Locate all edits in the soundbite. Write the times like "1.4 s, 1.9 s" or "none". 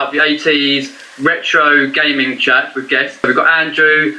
3.2 s